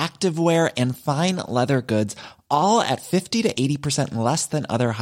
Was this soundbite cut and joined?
no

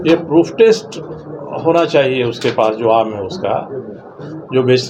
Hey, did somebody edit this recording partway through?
no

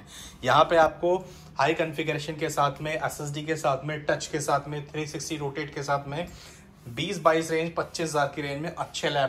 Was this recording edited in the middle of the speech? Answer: no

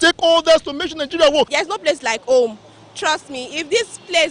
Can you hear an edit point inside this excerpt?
yes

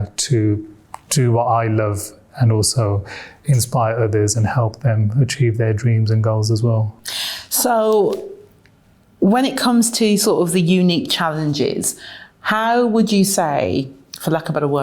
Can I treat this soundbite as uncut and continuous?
yes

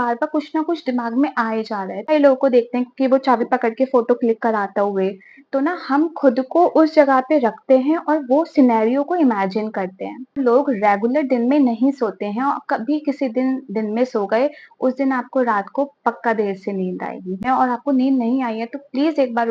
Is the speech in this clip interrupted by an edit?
yes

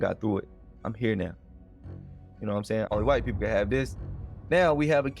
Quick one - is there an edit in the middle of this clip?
yes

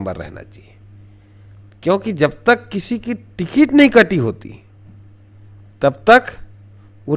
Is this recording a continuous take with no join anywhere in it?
yes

